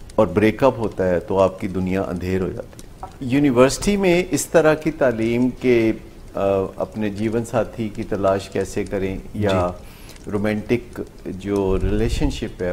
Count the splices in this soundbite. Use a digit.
1